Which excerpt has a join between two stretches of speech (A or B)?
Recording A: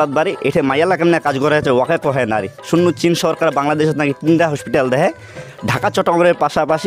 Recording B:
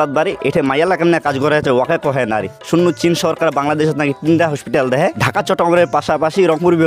B